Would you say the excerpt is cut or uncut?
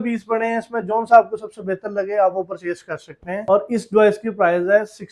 uncut